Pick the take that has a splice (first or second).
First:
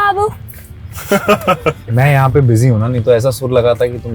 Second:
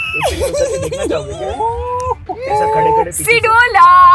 first